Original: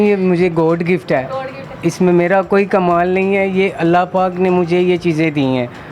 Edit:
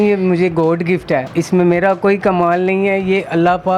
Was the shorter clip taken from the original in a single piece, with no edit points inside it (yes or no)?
no